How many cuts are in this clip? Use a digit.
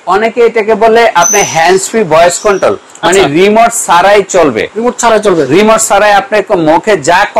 0